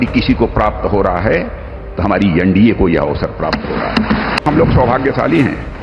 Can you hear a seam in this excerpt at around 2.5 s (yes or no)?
no